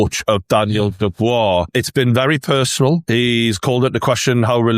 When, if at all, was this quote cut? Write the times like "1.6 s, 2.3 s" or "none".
1.7 s, 3.0 s